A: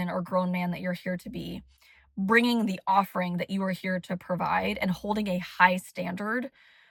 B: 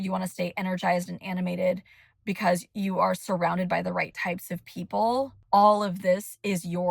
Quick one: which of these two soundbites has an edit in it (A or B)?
B